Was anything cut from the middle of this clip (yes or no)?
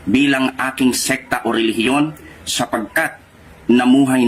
yes